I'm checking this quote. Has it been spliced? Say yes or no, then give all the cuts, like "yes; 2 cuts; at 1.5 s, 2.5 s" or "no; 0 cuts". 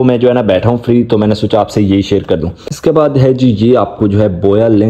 no; 0 cuts